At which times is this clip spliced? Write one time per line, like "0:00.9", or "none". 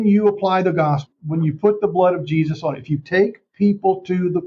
0:01.1

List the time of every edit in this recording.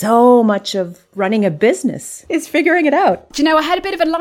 0:01.0
0:02.1
0:03.3

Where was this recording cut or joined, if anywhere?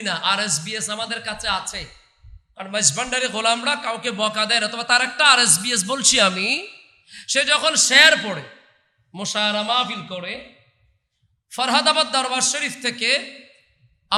none

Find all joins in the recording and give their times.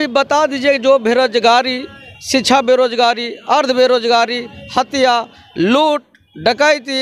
none

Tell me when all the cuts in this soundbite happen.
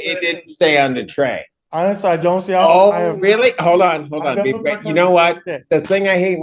0:01.5

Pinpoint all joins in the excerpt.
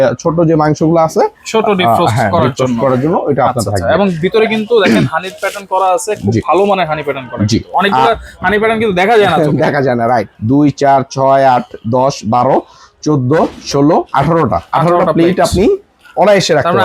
0:10.3

